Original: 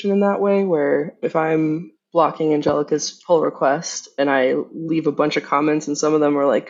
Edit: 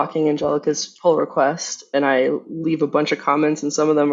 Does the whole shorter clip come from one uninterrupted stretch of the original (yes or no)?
yes